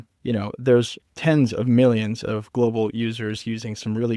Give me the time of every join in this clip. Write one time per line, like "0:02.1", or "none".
0:01.0